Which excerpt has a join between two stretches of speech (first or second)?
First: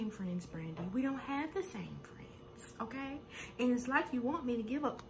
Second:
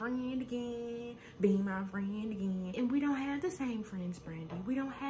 second